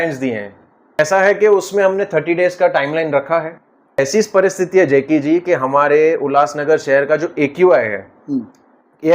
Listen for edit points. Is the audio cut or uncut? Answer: cut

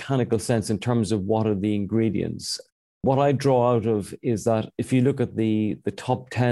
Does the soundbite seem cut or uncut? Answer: uncut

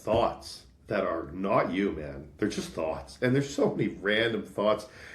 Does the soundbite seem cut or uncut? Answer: uncut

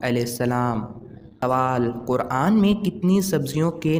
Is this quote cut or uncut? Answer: uncut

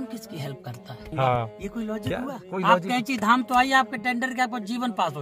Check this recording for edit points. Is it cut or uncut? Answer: cut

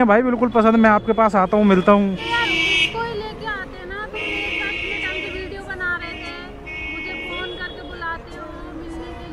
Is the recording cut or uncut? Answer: uncut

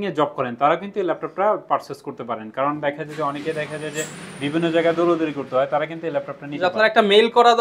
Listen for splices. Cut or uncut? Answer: uncut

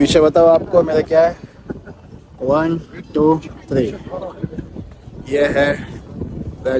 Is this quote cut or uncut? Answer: uncut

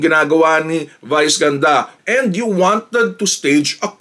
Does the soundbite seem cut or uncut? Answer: cut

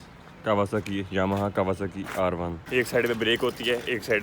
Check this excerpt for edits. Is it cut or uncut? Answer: cut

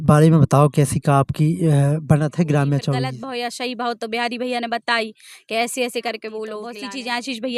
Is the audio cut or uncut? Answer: cut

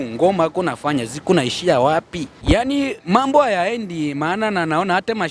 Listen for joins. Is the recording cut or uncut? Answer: cut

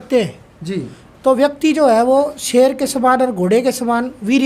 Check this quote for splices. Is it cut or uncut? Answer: uncut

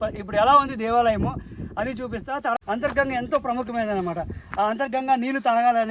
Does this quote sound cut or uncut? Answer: cut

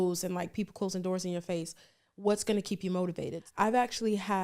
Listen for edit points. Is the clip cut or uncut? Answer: cut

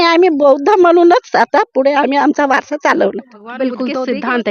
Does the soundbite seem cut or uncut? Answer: cut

